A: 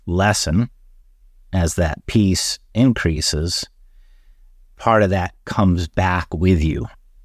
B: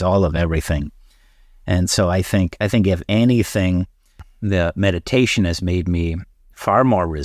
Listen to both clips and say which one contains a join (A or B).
B